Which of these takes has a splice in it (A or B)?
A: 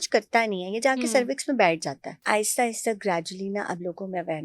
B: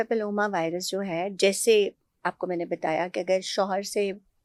A